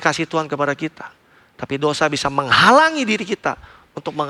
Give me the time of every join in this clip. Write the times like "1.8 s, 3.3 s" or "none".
none